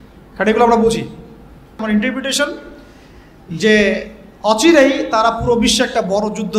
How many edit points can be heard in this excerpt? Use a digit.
1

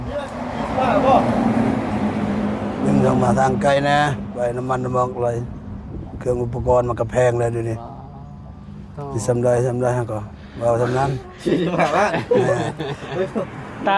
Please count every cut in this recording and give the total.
0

